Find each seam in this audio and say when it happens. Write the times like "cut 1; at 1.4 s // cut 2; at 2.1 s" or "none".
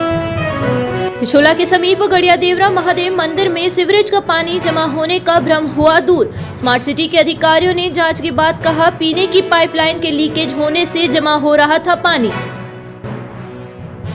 cut 1; at 0.9 s